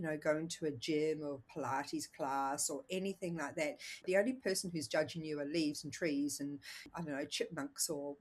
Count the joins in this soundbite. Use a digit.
2